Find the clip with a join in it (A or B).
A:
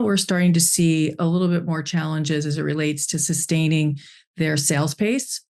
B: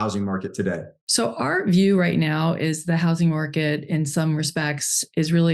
B